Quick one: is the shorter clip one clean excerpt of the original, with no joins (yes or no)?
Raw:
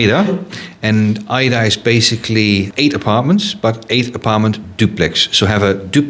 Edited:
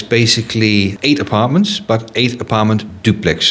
yes